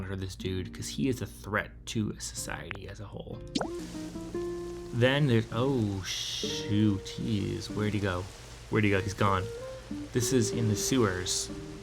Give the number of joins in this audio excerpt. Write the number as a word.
one